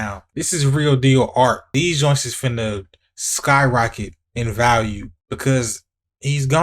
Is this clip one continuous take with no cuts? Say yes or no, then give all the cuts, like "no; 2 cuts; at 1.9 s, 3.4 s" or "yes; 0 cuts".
no; 1 cut; at 1.7 s